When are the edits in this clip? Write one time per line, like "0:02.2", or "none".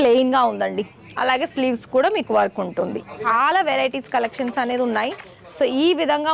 0:03.2